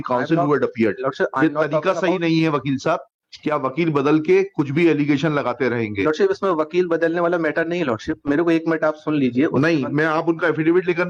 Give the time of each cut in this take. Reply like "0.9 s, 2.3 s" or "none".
none